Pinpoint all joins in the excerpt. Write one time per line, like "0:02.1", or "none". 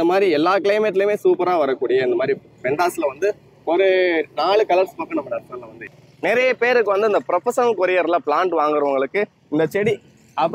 0:06.0

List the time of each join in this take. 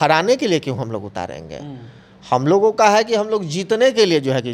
none

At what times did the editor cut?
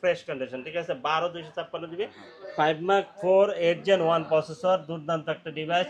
0:02.3

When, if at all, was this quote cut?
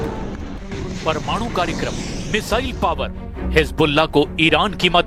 none

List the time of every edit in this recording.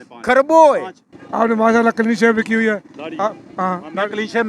0:01.1

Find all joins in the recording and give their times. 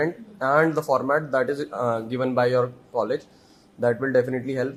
none

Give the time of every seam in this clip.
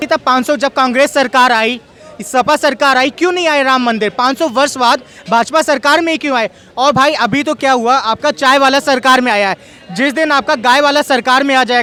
none

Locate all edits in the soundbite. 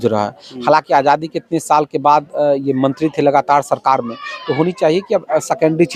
none

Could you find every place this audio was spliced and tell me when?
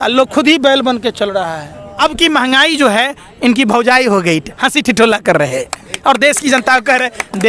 0:01.8

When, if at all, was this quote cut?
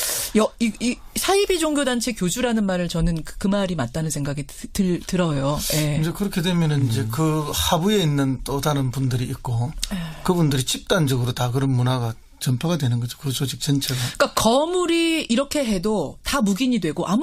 0:10.0

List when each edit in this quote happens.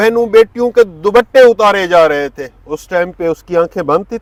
none

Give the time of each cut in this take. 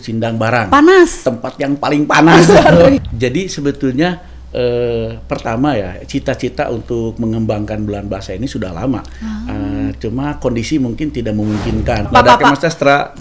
0:03.0
0:12.1

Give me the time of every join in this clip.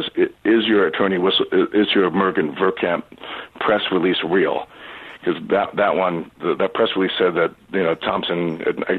none

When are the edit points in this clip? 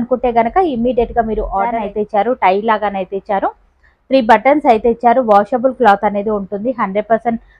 0:01.7

